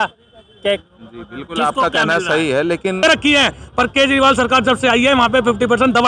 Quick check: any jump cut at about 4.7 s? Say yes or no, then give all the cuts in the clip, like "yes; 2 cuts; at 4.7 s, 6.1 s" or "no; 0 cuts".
no; 1 cut; at 3.0 s